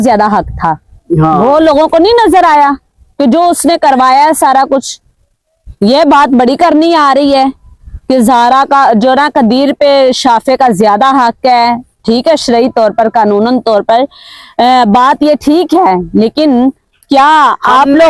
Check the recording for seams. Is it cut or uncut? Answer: uncut